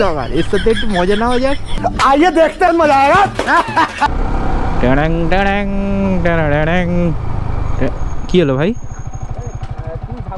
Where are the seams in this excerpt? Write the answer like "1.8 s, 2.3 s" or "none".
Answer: 1.7 s, 4.1 s